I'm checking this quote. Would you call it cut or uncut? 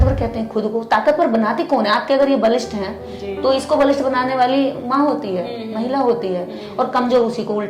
uncut